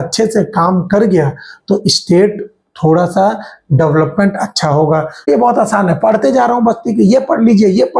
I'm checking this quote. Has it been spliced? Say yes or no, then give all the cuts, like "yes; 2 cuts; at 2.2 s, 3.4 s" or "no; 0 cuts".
yes; 1 cut; at 5.3 s